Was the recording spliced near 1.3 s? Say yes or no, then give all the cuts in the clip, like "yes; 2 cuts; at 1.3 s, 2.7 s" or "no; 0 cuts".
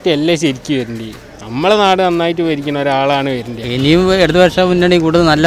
no; 1 cut; at 3.6 s